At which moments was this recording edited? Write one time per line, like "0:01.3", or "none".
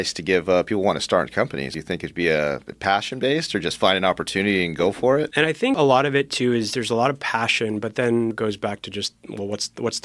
0:01.8
0:05.5
0:08.4